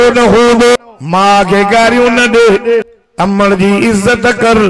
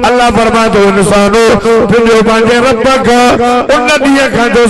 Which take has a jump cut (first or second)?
first